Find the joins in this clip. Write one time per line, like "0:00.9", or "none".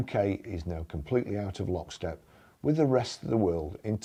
none

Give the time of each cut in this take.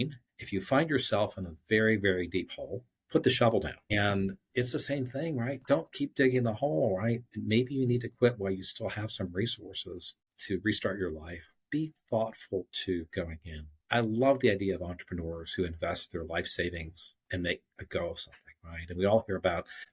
0:11.6
0:13.7

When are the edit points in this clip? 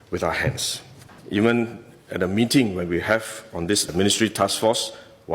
0:01.1

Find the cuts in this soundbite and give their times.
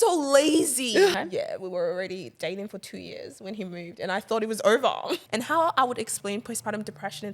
0:01.2
0:05.2

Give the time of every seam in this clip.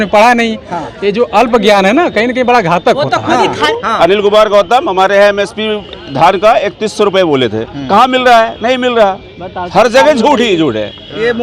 0:03.7

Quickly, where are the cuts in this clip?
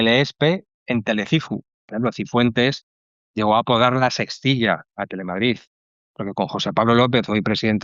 0:01.9

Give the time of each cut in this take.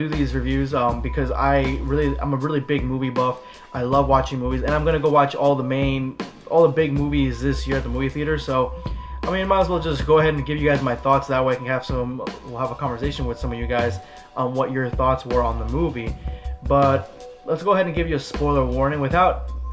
0:12.8

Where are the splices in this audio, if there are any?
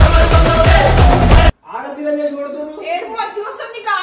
0:01.6

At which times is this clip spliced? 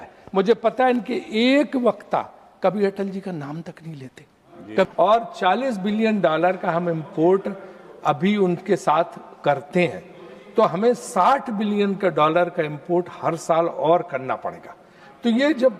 0:04.9

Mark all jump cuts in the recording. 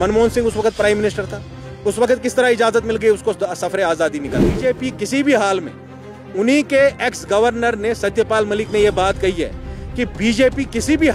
0:04.6

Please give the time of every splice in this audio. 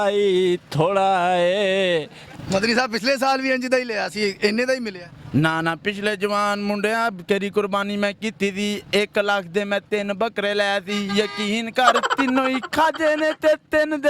0:02.2

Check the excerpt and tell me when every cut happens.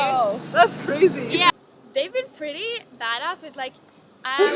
0:01.5

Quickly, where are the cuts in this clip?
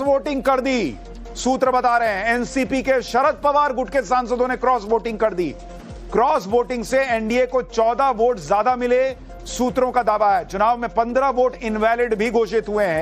0:03.8

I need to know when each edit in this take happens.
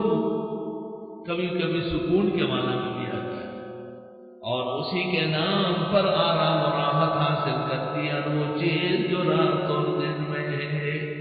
0:03.5

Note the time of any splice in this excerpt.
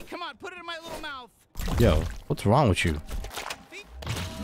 none

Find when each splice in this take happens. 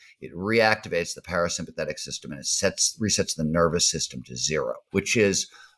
0:04.8

